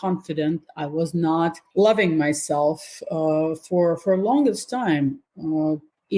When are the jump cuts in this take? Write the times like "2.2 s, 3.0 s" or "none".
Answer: 1.6 s

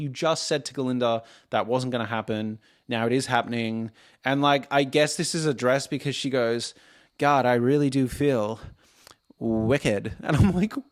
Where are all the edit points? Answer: none

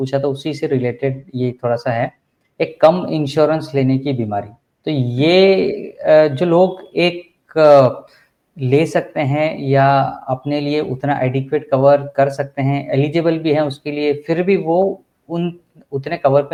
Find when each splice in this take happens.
none

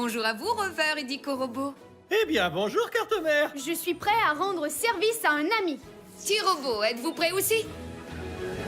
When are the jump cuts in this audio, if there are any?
7.8 s

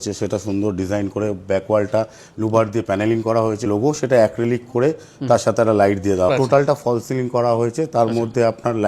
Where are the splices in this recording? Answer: 3.7 s, 6.3 s

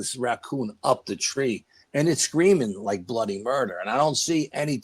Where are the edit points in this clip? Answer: none

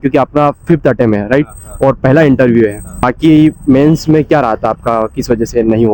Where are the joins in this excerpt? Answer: 3.1 s

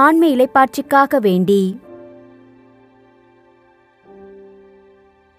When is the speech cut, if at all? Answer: 1.8 s

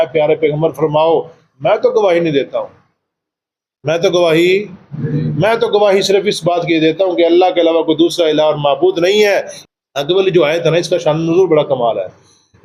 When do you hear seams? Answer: 9.6 s

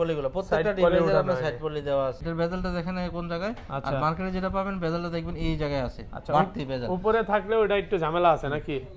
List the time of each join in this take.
2.2 s

